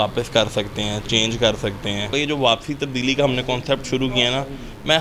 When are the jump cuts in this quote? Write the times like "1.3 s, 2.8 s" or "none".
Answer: 2.1 s